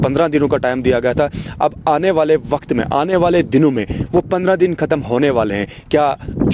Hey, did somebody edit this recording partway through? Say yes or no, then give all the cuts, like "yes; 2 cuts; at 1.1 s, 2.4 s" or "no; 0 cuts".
no; 0 cuts